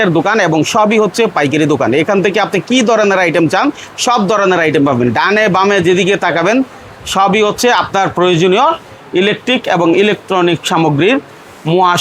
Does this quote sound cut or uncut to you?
uncut